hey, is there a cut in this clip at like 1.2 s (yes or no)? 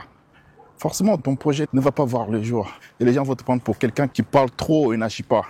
yes